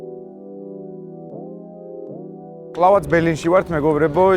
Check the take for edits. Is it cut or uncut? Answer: cut